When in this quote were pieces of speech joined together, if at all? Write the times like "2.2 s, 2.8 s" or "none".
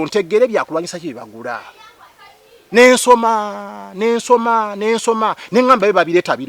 none